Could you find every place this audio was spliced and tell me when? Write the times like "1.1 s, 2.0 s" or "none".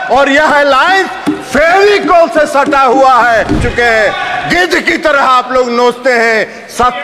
3.6 s